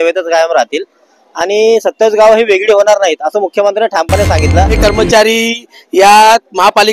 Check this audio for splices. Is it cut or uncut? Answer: cut